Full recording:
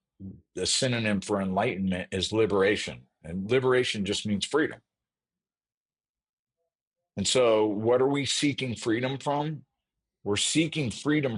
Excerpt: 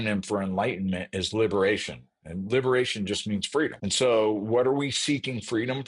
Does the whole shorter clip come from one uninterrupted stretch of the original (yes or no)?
no